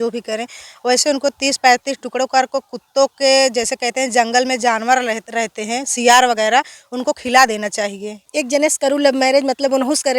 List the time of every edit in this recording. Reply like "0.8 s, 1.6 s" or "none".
8.3 s